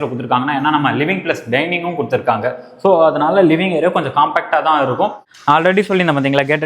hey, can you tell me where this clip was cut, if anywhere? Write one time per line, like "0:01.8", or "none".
0:05.3